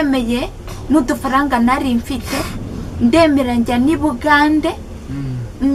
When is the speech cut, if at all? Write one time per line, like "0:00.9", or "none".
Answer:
none